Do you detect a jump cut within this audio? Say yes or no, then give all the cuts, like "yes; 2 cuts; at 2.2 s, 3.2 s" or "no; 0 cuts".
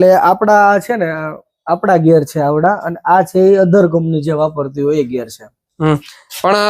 no; 0 cuts